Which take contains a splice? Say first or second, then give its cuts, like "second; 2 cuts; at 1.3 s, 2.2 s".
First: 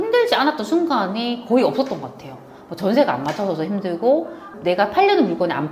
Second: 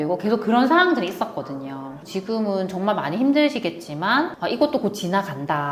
second; 1 cut; at 2.1 s